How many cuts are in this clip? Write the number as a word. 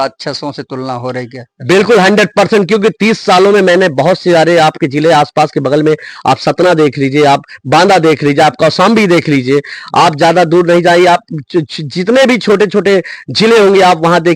zero